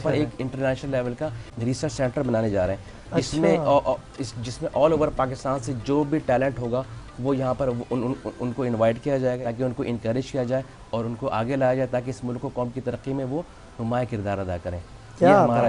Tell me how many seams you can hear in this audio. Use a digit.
2